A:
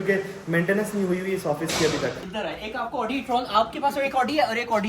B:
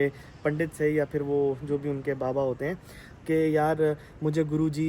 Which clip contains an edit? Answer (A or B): A